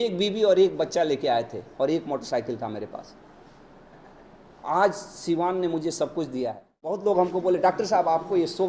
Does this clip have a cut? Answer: yes; 1 cut; at 7.0 s

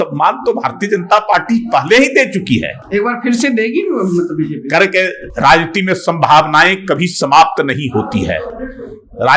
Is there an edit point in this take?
no; 0 cuts

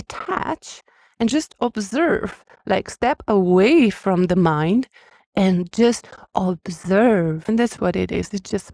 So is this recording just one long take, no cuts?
no; 1 cut; at 7.5 s

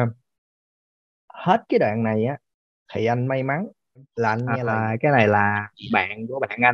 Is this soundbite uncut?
no; 1 cut; at 4.5 s

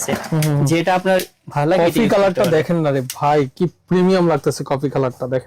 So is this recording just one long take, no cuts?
yes; 0 cuts

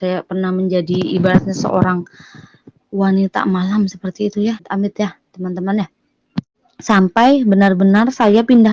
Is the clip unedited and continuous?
no; 2 cuts; at 4.7 s, 6.6 s

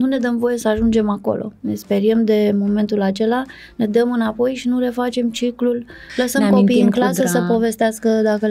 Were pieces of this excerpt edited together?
yes; 1 cut; at 6.0 s

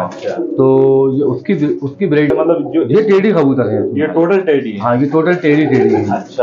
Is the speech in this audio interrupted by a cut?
yes; 1 cut; at 2.3 s

